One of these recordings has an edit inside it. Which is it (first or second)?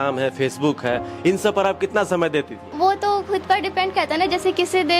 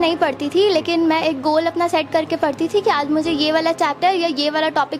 first